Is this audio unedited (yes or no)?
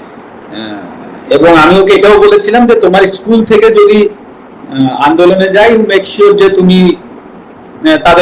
yes